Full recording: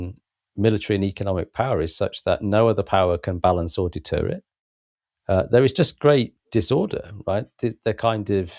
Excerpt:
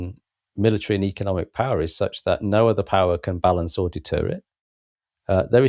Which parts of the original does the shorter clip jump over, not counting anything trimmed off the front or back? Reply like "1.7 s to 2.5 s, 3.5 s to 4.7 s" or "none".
none

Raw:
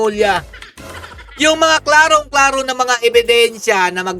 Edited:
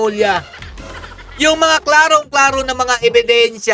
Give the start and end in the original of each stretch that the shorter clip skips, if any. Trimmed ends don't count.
none

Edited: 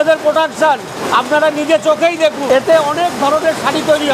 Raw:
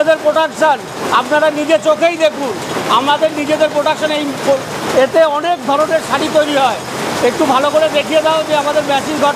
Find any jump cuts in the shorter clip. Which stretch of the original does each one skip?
2.4 s to 4.9 s

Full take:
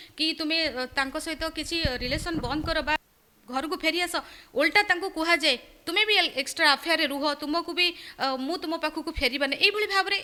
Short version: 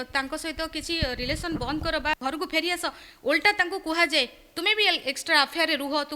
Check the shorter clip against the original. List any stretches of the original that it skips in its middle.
3.0 s to 3.5 s

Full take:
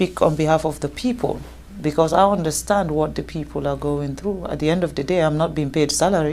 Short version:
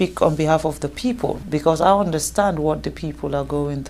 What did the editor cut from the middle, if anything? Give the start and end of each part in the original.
1.4 s to 1.7 s

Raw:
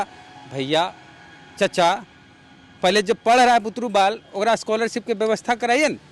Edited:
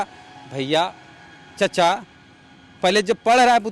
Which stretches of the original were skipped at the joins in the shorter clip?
none

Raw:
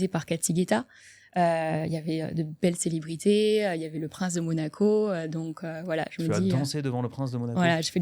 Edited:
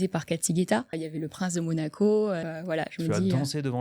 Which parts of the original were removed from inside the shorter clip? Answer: 1.0 s to 3.8 s, 5.2 s to 5.6 s

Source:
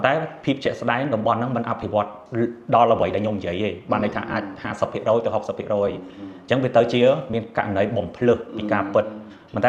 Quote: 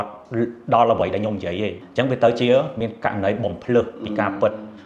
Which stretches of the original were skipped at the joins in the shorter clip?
3.8 s to 6.3 s

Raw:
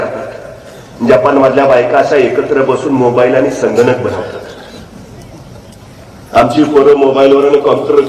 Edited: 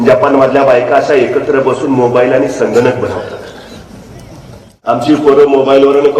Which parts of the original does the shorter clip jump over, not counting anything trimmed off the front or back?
5.9 s to 6.4 s

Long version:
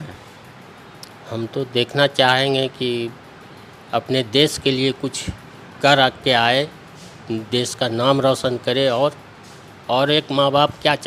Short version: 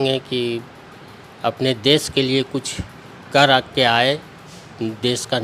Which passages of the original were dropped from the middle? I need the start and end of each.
none

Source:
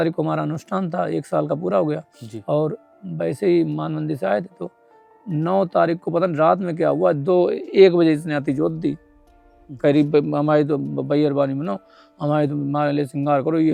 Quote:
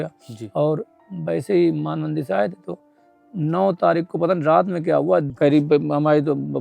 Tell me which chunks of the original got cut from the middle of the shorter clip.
7.2 s to 9.7 s

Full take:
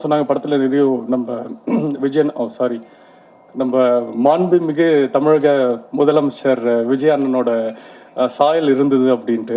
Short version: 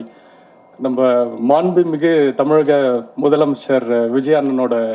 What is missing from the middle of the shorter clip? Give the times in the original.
none

